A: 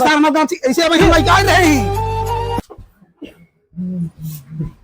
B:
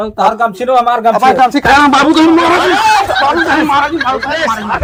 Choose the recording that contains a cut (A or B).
A